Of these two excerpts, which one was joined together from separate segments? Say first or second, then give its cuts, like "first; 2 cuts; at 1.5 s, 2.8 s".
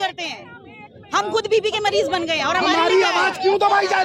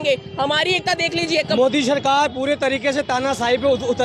second; 1 cut; at 1.6 s